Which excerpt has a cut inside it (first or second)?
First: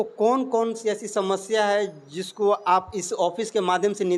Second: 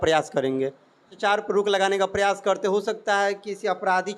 second